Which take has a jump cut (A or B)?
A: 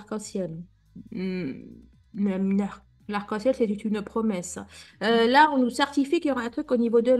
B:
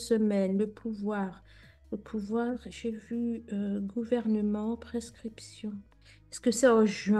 B